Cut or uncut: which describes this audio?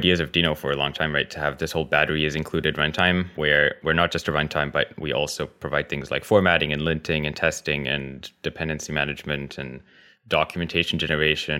uncut